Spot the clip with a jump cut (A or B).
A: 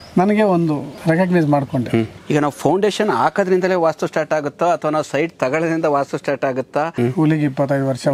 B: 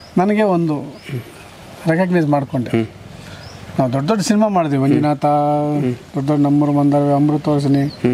A